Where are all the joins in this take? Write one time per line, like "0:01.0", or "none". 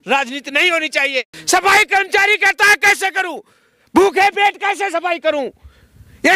0:01.3